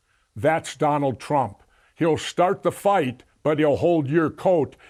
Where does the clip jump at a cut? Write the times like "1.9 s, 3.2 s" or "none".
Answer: none